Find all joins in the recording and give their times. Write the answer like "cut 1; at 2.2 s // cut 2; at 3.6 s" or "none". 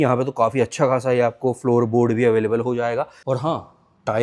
cut 1; at 3.1 s